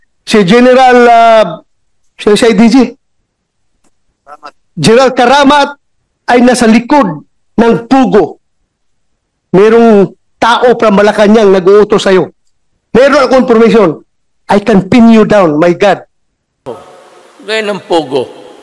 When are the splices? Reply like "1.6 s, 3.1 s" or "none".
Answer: 16.7 s